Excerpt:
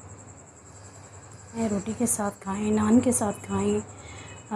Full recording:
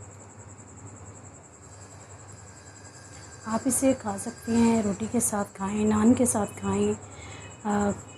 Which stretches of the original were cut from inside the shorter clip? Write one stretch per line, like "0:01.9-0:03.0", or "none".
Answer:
0:02.6-0:04.7